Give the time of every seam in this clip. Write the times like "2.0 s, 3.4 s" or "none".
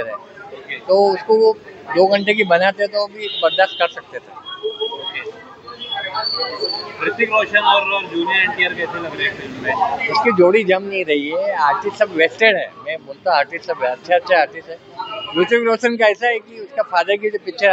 none

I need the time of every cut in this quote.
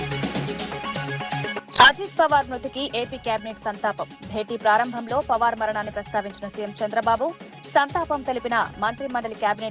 1.5 s

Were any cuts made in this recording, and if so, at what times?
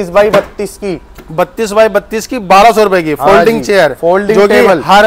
none

